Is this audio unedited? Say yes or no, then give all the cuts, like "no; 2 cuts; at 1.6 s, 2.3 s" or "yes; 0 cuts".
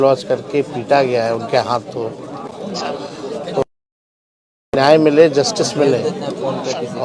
yes; 0 cuts